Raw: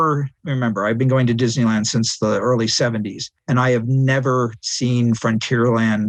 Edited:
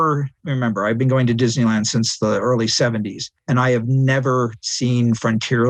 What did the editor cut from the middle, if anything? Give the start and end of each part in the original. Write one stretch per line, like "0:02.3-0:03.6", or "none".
none